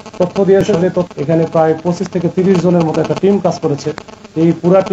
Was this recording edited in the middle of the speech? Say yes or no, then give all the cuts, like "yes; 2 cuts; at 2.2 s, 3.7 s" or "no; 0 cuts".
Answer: yes; 1 cut; at 1.1 s